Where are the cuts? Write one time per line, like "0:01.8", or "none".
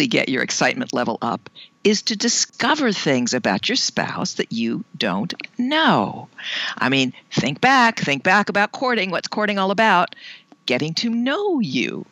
0:02.5